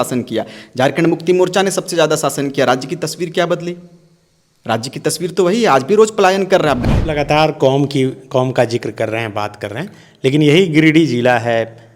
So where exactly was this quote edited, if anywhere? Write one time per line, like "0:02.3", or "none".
0:06.8

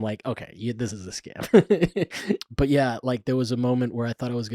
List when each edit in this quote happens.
0:02.4

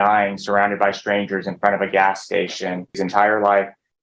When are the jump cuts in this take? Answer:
0:03.0

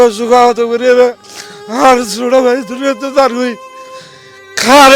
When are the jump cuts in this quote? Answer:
none

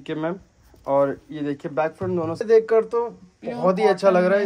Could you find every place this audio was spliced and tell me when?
0:02.4

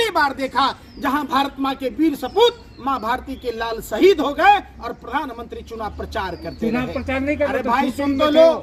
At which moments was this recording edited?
none

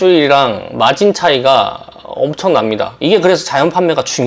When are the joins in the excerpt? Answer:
0:02.9

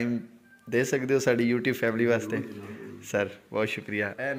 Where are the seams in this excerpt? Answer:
none

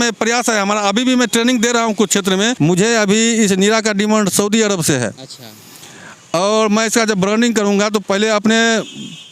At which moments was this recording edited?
0:02.5

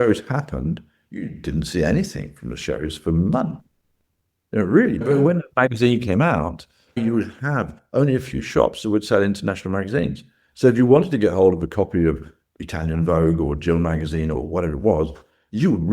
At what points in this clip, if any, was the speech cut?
0:05.0
0:07.0
0:14.4

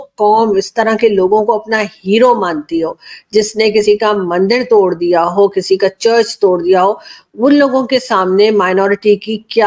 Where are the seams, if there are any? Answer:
none

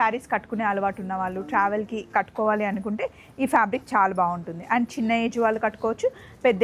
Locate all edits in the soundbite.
none

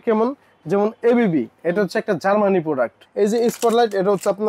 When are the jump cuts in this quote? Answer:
0:03.0

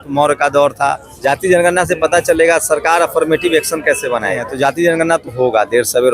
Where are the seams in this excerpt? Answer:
0:01.1
0:04.5

